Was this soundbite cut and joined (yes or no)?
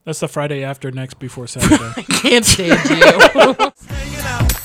yes